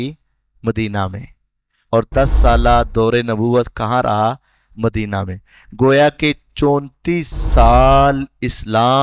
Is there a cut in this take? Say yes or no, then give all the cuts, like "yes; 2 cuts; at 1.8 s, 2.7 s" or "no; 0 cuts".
yes; 1 cut; at 2.1 s